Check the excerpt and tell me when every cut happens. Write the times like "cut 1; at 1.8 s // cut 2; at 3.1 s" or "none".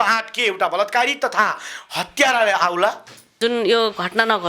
cut 1; at 3.3 s